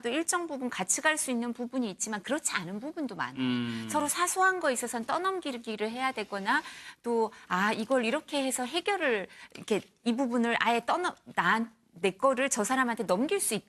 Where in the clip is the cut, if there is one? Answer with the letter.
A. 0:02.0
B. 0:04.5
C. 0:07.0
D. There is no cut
C